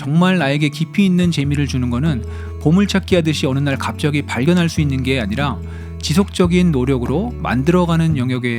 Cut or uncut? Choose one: uncut